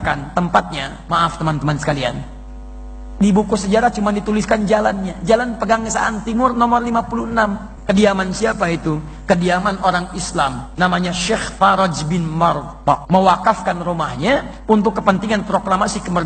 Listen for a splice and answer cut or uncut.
cut